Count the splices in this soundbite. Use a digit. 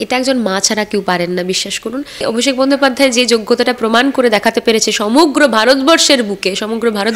1